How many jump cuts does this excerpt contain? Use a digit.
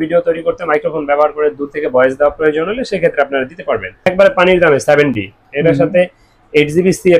1